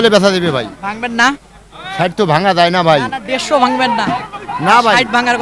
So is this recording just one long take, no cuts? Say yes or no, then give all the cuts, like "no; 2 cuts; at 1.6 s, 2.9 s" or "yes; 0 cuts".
yes; 0 cuts